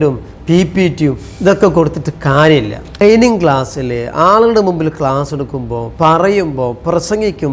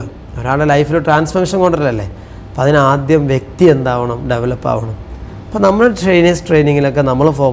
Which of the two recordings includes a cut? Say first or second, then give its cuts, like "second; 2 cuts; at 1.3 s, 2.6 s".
first; 1 cut; at 3.0 s